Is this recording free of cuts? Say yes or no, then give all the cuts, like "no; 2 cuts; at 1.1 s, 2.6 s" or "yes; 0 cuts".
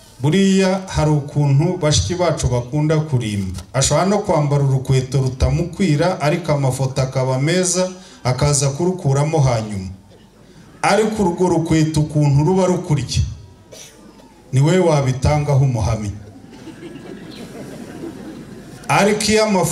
yes; 0 cuts